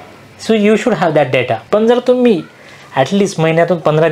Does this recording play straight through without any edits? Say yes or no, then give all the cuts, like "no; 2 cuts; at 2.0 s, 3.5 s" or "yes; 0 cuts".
yes; 0 cuts